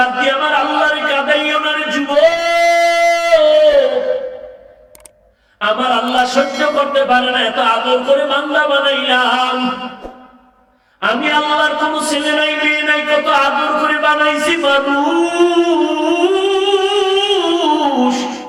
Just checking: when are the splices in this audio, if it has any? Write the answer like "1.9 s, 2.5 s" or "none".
none